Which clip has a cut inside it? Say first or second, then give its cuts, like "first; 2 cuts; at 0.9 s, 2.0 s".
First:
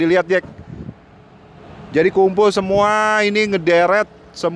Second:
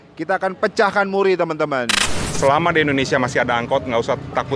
second; 1 cut; at 2.2 s